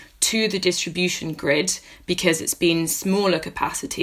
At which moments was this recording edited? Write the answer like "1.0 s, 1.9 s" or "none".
none